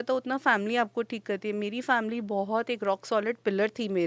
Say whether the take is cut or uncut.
uncut